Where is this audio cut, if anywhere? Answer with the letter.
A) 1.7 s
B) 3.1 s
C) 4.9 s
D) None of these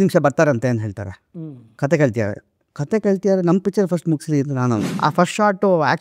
C